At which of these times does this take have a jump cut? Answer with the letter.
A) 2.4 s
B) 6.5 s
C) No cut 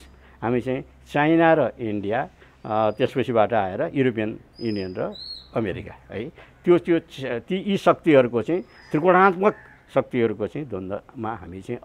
C